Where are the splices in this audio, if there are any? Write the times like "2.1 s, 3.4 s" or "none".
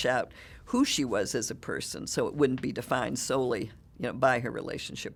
none